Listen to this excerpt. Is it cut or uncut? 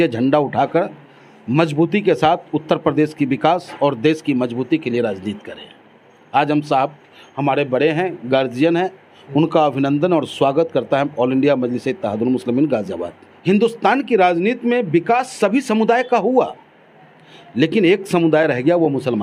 cut